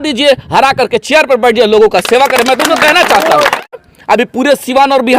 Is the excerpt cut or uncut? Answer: cut